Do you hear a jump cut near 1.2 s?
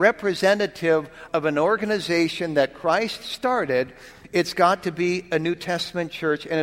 yes; 1 cut; at 1.2 s

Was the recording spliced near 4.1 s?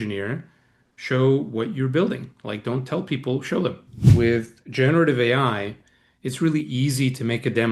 yes; 1 cut; at 4.1 s

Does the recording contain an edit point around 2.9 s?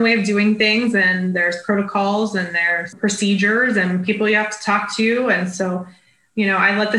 yes; 1 cut; at 2.9 s

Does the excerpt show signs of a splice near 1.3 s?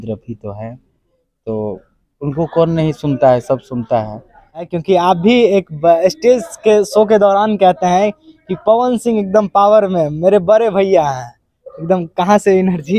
no; 1 cut; at 4.7 s

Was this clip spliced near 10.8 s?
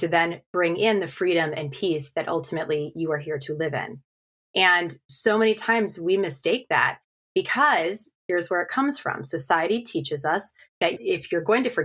yes; 1 cut; at 10.8 s

